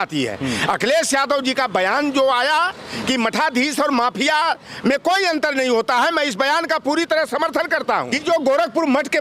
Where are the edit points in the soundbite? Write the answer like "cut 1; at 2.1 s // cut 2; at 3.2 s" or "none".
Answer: cut 1; at 8.1 s

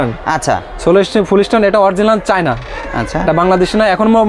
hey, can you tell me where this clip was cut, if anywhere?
none

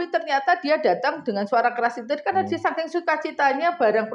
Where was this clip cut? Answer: none

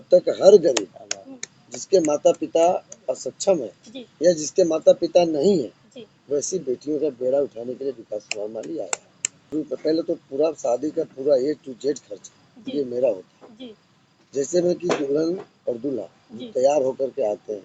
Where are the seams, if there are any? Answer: cut 1; at 9.5 s

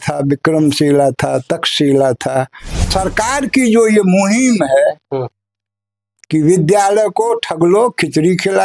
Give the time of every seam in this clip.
cut 1; at 2.9 s

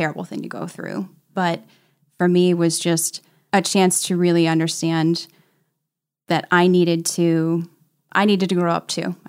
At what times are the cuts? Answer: none

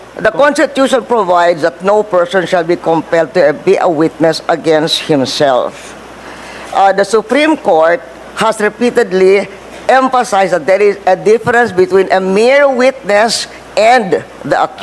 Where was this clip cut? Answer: none

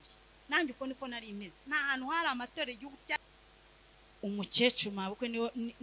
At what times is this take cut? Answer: cut 1; at 3.2 s

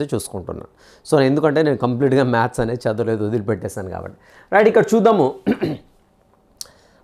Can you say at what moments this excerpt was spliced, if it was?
none

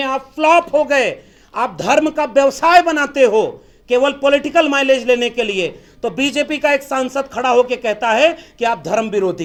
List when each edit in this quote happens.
none

